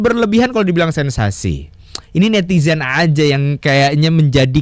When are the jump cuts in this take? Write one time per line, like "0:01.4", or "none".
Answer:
none

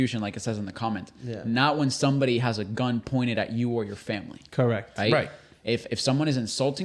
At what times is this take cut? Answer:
none

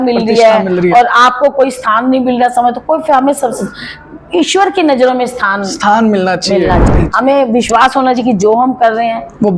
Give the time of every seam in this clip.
0:06.9

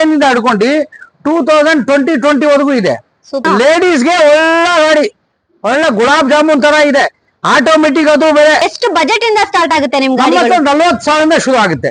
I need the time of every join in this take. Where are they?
0:03.4
0:08.7

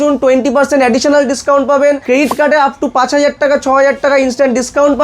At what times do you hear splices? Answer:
0:02.0

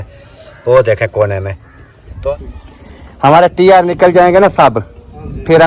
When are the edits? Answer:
0:02.3

